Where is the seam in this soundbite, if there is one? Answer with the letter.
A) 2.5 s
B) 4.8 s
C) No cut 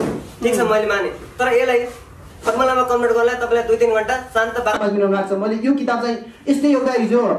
B